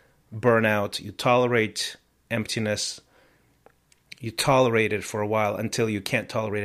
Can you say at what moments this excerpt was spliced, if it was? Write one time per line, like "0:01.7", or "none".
none